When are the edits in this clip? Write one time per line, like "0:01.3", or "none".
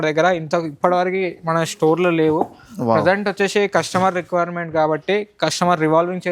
none